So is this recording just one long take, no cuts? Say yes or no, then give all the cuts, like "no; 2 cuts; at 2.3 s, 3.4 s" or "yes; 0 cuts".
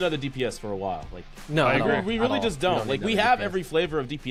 yes; 0 cuts